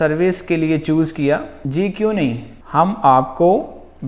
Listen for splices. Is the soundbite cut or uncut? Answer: cut